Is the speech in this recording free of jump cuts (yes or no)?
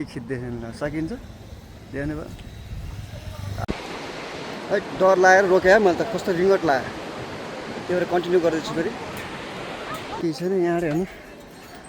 no